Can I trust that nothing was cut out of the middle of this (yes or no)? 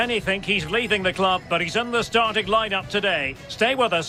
yes